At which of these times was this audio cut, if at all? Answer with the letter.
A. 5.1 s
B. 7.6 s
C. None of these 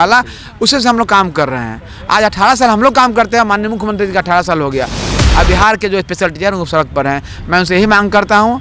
A